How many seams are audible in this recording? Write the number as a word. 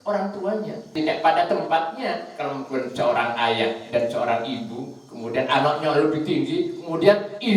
one